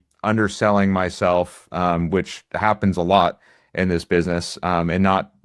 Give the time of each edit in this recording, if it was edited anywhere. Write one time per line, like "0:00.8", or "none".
none

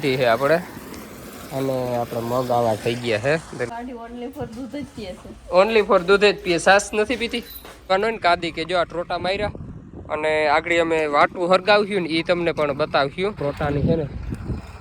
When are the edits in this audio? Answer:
0:03.7
0:07.9
0:13.4

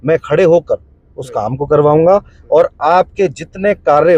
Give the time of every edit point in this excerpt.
none

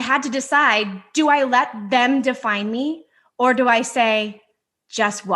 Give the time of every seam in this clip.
none

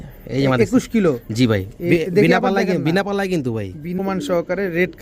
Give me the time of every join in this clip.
0:04.0

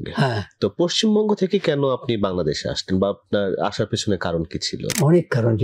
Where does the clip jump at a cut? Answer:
none

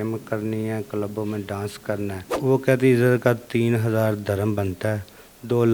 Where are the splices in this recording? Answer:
0:02.2

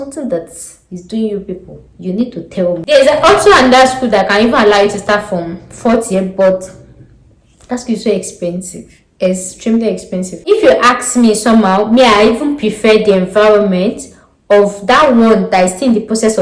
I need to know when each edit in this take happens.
0:02.9
0:10.5

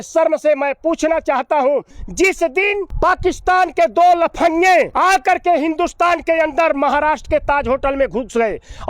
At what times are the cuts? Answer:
0:02.0
0:02.9
0:04.9

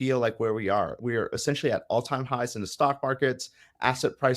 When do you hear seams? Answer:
0:01.0

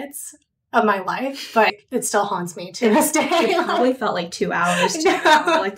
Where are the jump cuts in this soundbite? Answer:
none

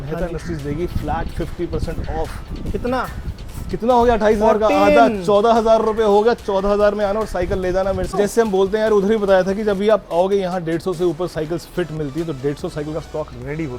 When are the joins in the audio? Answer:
0:08.1

